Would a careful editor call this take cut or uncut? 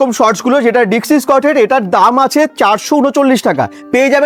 uncut